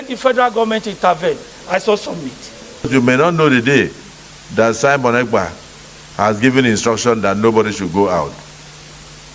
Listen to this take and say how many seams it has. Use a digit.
1